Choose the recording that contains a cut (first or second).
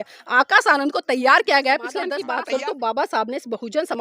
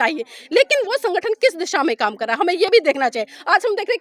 first